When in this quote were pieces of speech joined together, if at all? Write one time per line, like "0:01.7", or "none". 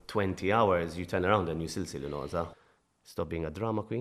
0:02.6